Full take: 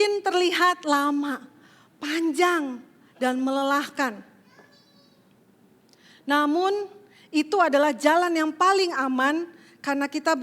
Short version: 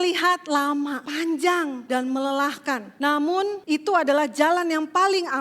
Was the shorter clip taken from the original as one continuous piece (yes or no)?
no